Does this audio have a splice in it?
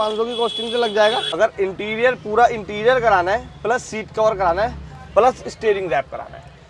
yes; 1 cut; at 1.4 s

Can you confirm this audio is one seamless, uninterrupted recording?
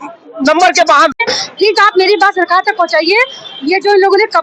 no; 1 cut; at 1.1 s

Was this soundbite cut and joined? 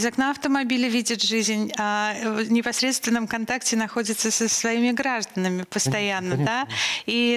no; 0 cuts

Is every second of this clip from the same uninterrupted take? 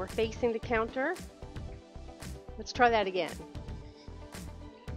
no; 1 cut; at 3.4 s

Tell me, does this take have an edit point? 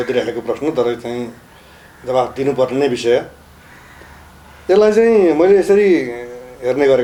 no; 0 cuts

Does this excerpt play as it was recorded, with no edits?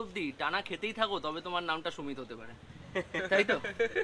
yes; 0 cuts

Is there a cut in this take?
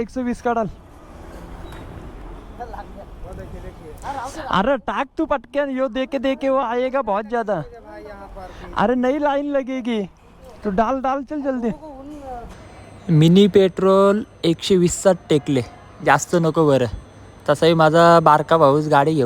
yes; 1 cut; at 12.6 s

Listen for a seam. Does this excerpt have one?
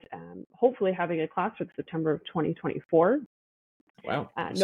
no; 0 cuts

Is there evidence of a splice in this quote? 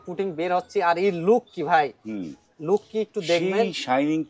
no; 0 cuts

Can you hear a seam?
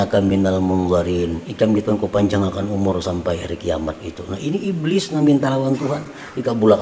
no; 0 cuts

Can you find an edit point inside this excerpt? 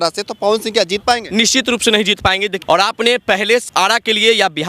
yes; 2 cuts; at 2.6 s, 3.7 s

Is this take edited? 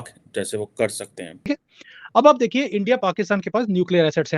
yes; 1 cut; at 1.5 s

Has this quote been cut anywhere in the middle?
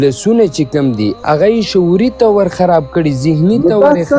yes; 1 cut; at 1.1 s

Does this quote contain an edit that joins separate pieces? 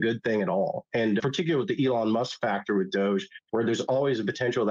yes; 1 cut; at 1.2 s

